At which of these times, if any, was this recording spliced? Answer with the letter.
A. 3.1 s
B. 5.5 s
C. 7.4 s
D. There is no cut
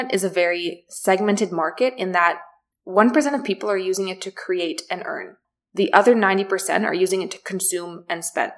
D